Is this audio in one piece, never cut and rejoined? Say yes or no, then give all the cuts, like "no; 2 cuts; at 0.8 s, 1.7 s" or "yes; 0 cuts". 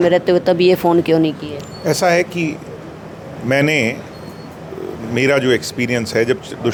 yes; 0 cuts